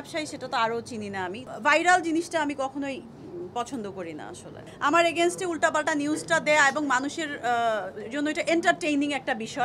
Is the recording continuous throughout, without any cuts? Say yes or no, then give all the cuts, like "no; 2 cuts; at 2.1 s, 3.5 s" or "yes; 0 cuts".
no; 2 cuts; at 1.4 s, 4.6 s